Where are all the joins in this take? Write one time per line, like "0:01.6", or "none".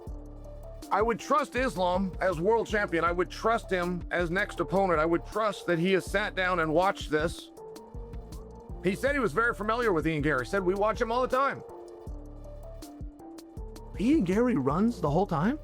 0:11.6
0:13.8